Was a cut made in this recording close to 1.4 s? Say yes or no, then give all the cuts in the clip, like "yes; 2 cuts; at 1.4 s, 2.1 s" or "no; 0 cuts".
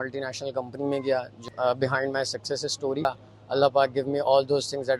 yes; 2 cuts; at 1.4 s, 3.1 s